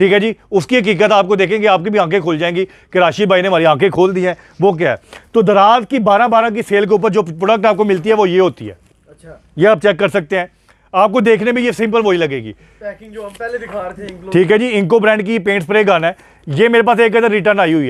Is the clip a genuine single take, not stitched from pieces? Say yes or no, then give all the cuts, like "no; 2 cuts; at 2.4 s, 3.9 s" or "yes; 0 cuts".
yes; 0 cuts